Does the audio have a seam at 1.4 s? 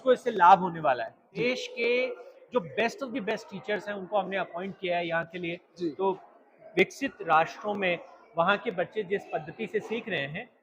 yes; 2 cuts; at 1.4 s, 6.4 s

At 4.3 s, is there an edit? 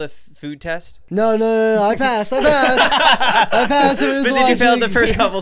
no; 1 cut; at 0.9 s

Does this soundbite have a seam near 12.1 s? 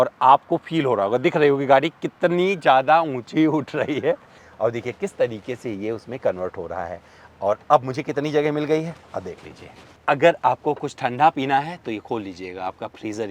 no; 2 cuts; at 4.4 s, 9.9 s

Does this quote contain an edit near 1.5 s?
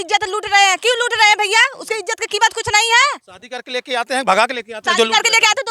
no; 0 cuts

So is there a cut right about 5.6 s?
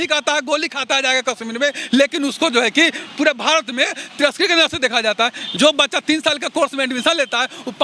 yes; 1 cut; at 5.6 s

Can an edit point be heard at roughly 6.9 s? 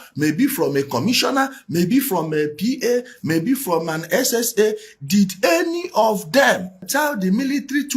yes; 1 cut; at 6.9 s

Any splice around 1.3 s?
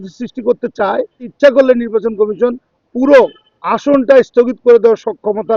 yes; 1 cut; at 1.3 s

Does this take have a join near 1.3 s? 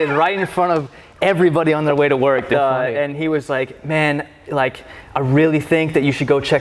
no; 1 cut; at 2.5 s

